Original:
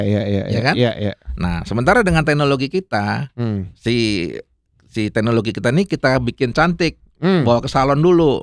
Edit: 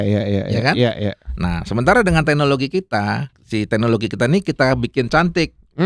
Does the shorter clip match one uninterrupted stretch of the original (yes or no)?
no